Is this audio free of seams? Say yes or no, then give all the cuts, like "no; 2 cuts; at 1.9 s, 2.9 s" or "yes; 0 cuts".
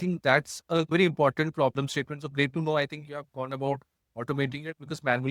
yes; 0 cuts